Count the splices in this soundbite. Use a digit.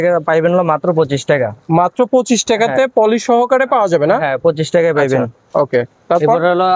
0